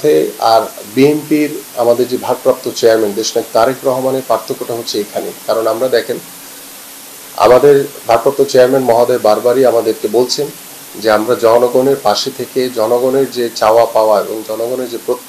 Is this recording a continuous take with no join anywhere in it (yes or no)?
yes